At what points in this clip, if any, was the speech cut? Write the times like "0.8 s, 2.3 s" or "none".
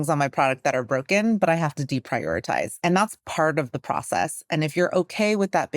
2.7 s